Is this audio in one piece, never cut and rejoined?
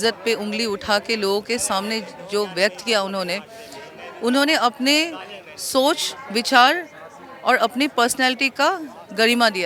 yes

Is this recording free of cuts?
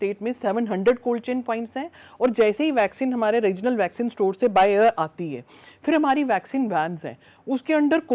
yes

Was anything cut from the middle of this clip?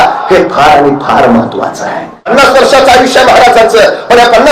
yes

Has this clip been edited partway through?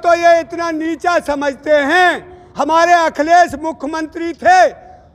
no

